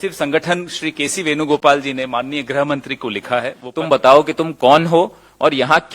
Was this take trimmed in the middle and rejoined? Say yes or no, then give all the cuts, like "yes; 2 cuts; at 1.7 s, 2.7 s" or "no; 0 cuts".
yes; 1 cut; at 3.6 s